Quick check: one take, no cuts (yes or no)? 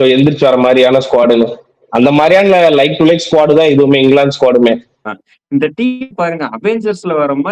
no